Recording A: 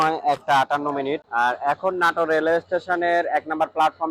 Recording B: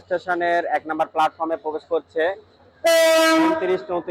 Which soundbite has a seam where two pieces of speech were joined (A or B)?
A